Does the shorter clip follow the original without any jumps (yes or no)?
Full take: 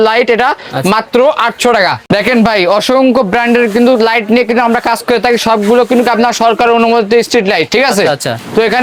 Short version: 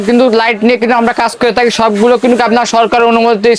yes